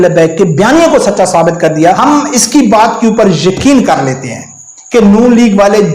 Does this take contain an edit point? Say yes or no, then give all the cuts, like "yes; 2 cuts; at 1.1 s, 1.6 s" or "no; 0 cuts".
yes; 1 cut; at 2.0 s